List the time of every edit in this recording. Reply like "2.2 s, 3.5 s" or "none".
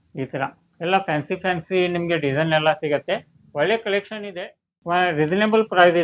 none